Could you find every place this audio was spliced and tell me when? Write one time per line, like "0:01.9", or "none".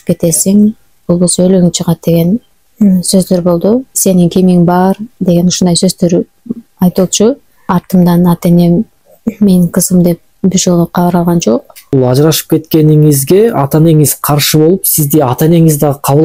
0:04.0
0:07.5
0:11.7